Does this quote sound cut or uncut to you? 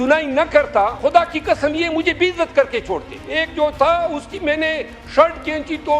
cut